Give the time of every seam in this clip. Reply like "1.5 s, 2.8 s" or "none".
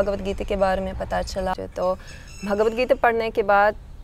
1.6 s